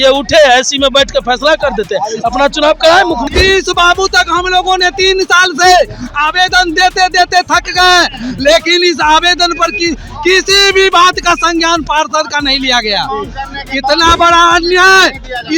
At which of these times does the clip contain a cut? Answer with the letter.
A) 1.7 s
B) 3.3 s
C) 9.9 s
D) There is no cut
B